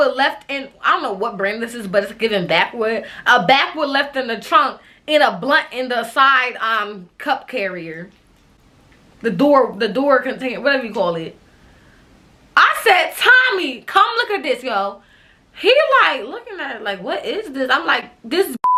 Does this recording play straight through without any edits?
yes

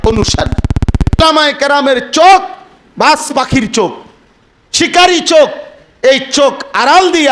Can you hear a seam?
yes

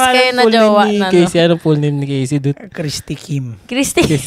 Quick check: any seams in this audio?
no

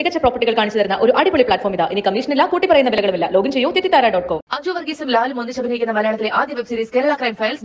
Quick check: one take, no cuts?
yes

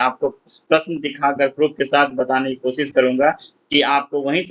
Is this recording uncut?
yes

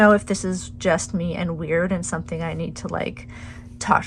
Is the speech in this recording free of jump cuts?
yes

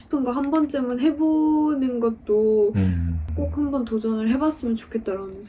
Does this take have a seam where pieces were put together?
no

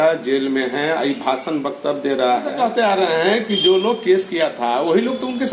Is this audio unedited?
no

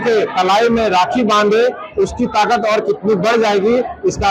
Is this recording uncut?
yes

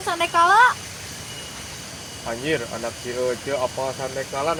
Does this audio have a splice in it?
no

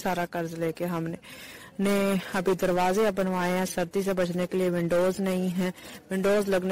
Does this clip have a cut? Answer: no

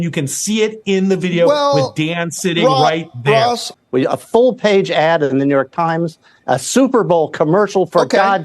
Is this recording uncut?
no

